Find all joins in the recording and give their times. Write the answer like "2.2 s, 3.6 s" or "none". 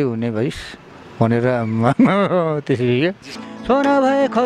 3.5 s